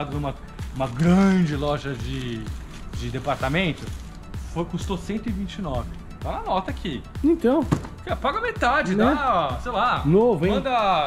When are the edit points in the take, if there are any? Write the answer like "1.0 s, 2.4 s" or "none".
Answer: none